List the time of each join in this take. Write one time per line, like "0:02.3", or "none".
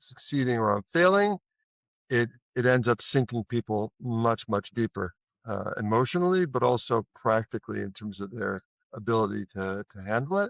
none